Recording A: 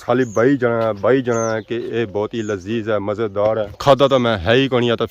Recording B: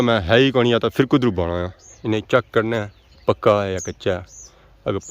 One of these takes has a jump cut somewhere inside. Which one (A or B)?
B